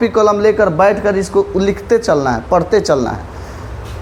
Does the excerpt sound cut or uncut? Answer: uncut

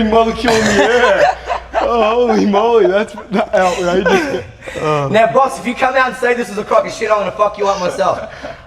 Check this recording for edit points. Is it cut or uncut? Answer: uncut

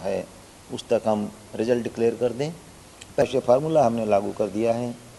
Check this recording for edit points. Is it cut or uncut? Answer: cut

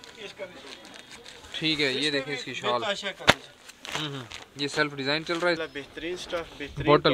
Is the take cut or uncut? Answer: cut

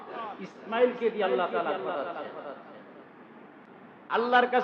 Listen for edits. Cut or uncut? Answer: cut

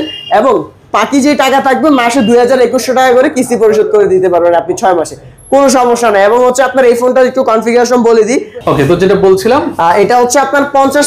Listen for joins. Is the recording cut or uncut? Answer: uncut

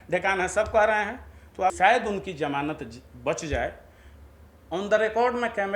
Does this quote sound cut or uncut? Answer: cut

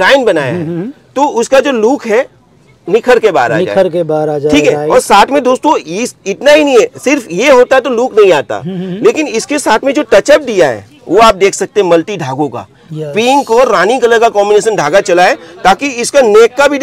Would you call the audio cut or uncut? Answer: uncut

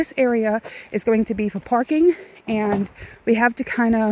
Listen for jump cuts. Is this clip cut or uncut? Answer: uncut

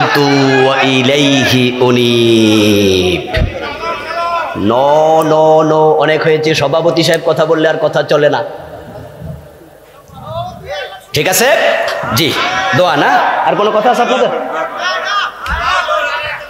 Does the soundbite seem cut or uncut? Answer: uncut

